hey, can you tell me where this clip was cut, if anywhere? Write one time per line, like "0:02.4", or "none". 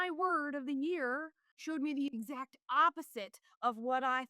0:01.6